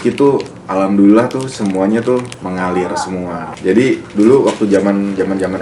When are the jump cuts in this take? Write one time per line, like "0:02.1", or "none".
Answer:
0:02.3
0:03.4